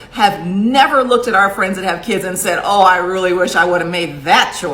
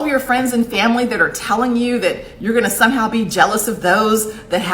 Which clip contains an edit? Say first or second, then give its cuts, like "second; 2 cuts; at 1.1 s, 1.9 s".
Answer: first; 1 cut; at 1.9 s